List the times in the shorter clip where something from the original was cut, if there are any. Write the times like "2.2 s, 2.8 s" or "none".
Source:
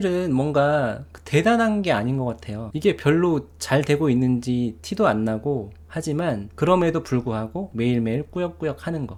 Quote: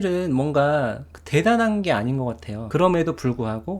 2.6 s